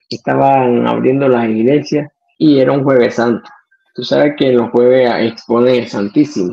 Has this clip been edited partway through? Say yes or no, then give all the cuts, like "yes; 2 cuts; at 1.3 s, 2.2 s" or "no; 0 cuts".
yes; 1 cut; at 2.2 s